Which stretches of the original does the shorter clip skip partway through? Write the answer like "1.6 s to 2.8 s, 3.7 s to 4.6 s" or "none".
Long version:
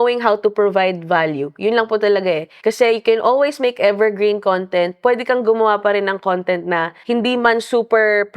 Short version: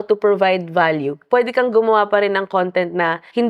1.6 s to 4.9 s